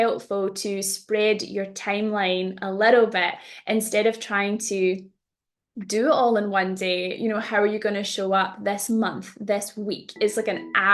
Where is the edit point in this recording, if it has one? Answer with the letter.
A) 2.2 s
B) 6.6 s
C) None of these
C